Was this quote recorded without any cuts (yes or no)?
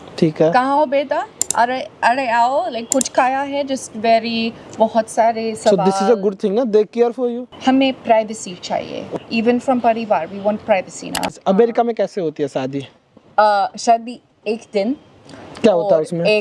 no